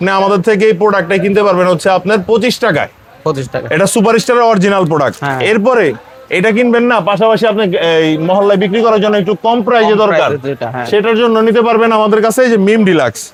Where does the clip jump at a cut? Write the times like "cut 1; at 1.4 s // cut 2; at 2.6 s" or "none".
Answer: none